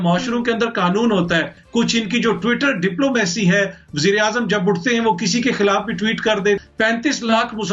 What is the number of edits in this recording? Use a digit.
2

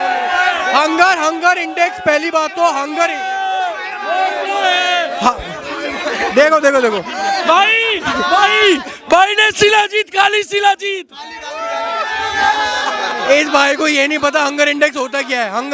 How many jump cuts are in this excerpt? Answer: 0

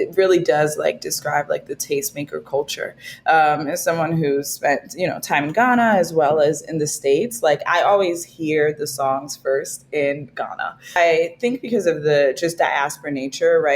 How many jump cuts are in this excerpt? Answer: 1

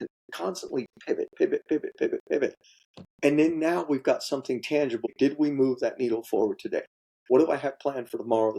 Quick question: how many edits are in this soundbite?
2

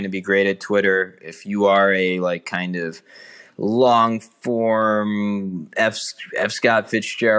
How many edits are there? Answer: 0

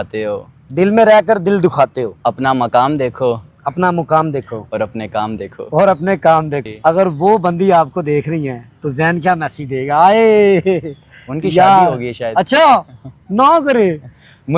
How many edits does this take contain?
1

